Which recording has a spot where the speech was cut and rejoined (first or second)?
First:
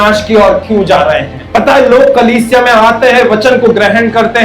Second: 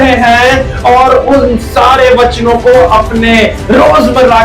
first